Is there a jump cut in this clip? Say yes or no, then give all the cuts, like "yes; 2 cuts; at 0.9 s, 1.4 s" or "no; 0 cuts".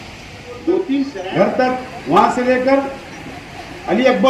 yes; 1 cut; at 1.2 s